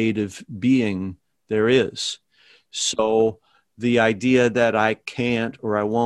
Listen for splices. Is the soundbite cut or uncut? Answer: uncut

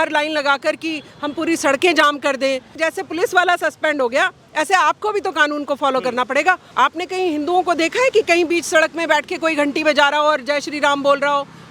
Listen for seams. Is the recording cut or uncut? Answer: cut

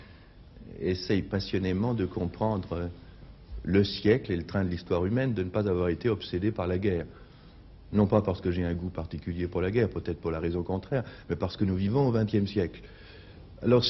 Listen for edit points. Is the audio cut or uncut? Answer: cut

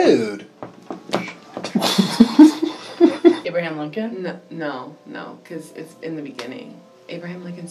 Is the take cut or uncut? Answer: cut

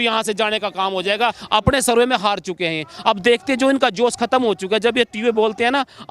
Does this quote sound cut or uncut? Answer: cut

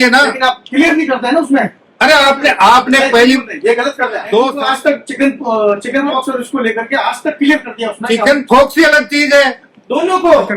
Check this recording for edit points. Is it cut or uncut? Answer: cut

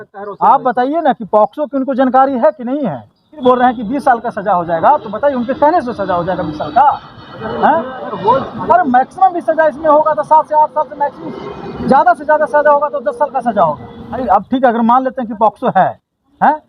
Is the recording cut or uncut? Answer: cut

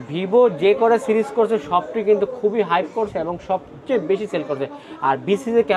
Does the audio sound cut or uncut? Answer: uncut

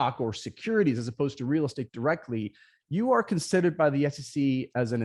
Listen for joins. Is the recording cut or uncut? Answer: uncut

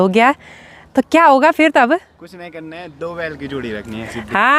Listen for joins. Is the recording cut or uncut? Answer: uncut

